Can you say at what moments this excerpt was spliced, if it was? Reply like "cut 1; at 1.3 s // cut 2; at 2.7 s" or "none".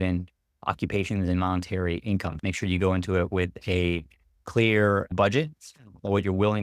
cut 1; at 2.4 s // cut 2; at 5.1 s